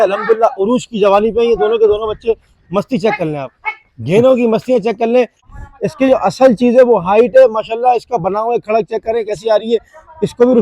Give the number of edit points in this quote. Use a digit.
1